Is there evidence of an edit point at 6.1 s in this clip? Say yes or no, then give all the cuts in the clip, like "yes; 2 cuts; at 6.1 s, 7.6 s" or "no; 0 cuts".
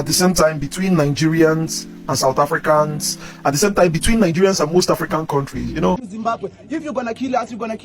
yes; 1 cut; at 6.1 s